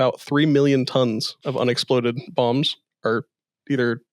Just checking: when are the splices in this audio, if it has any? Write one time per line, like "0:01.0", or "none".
0:01.4